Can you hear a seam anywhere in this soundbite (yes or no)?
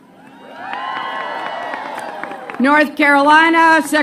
no